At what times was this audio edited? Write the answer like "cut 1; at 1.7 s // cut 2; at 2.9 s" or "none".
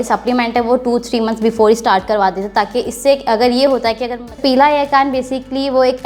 cut 1; at 4.3 s